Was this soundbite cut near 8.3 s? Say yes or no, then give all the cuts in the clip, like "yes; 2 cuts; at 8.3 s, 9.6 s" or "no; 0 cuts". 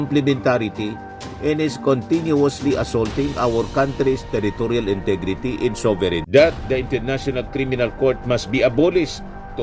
no; 1 cut; at 6.2 s